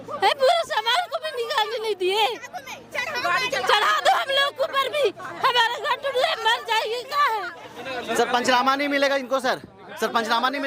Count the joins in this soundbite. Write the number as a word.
one